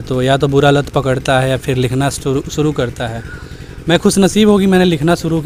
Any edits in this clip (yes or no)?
no